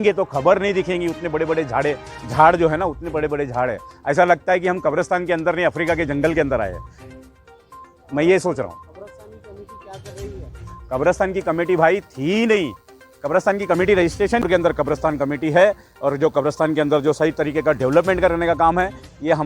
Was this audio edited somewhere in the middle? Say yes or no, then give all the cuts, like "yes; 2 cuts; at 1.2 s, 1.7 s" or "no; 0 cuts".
yes; 1 cut; at 14.4 s